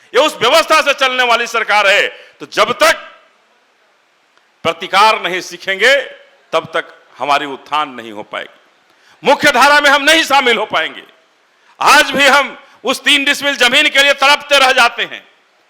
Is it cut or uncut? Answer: uncut